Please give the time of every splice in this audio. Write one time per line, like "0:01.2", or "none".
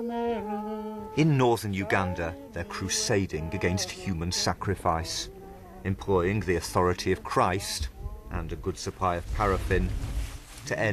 none

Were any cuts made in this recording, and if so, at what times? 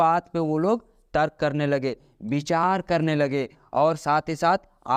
none

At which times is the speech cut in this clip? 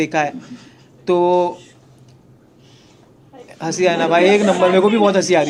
none

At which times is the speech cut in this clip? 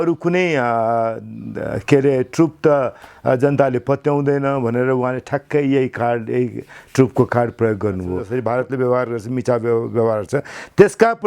0:08.2

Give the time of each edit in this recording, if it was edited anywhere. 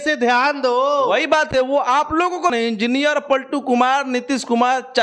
0:02.5

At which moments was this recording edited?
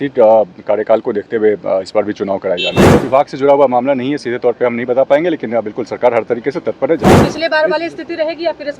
0:02.9
0:07.2

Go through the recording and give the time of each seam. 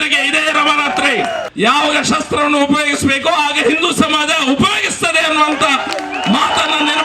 0:01.5

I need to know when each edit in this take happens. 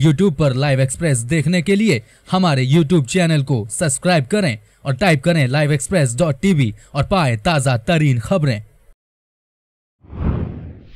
0:09.7

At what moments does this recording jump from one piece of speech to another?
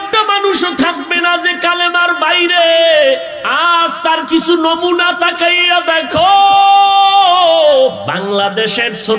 0:03.4
0:08.0

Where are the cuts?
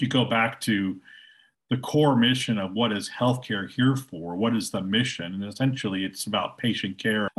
none

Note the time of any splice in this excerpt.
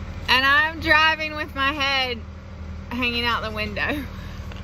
none

